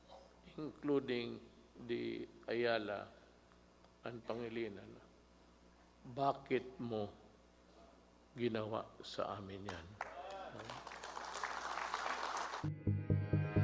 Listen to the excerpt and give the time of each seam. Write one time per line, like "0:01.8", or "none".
0:12.4